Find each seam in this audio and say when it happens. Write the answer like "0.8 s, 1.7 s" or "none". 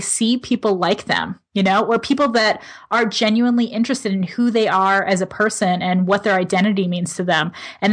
none